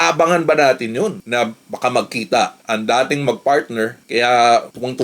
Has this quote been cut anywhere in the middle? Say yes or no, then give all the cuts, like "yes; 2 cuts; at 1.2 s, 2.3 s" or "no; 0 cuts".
yes; 1 cut; at 4.0 s